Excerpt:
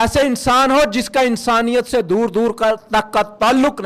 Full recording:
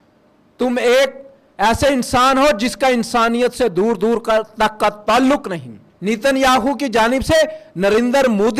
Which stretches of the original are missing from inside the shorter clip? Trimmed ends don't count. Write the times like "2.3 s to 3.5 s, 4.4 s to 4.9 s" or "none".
none